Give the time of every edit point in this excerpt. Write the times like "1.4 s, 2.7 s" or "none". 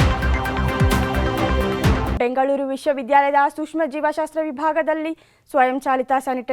2.1 s